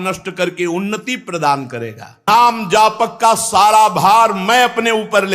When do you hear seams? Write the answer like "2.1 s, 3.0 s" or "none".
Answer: 2.3 s